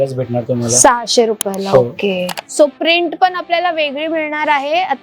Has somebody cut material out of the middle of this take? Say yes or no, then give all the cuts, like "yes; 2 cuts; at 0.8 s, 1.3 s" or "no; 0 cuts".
yes; 1 cut; at 2.3 s